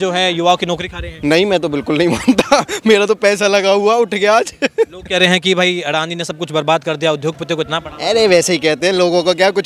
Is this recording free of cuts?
yes; 0 cuts

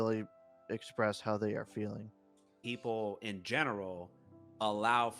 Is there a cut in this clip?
yes; 1 cut; at 2.6 s

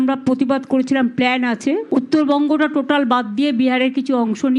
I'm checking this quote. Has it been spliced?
no; 0 cuts

